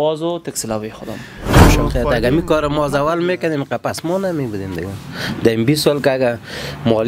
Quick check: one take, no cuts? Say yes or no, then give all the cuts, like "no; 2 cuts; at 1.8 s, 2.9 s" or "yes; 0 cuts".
no; 1 cut; at 1.6 s